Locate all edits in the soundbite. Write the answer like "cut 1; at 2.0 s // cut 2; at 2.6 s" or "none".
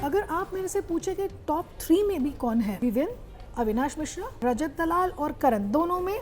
cut 1; at 2.9 s // cut 2; at 4.4 s

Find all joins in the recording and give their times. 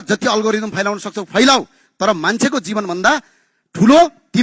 none

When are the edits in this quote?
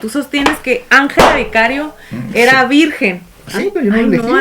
cut 1; at 3.4 s

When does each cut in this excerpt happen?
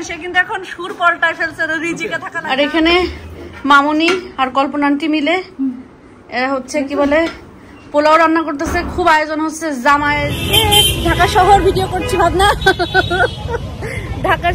cut 1; at 2.3 s // cut 2; at 10.3 s

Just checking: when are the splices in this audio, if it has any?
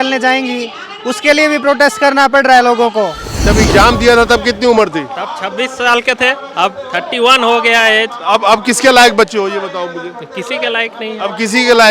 cut 1; at 3.4 s

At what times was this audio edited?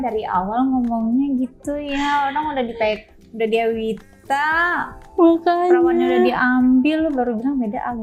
none

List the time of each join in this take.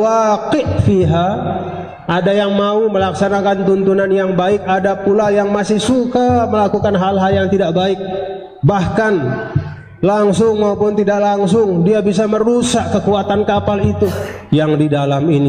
cut 1; at 14.3 s

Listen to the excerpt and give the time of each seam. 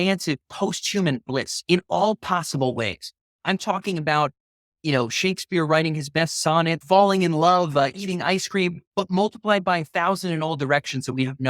cut 1; at 6.8 s

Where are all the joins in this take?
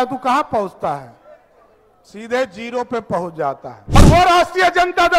cut 1; at 4.0 s

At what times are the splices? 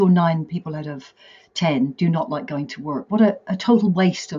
none

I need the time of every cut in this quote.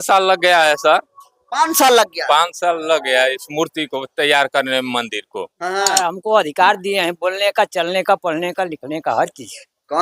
cut 1; at 5.9 s

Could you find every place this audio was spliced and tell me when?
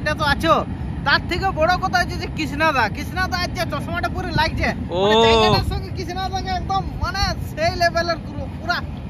none

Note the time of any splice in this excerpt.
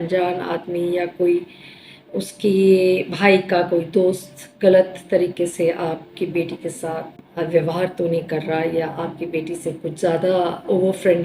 cut 1; at 7.2 s

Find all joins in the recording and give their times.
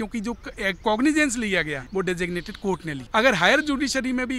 cut 1; at 1.8 s // cut 2; at 3.0 s

